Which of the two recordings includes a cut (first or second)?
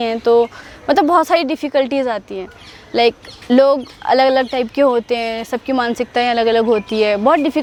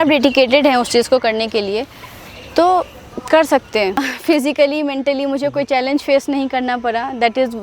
second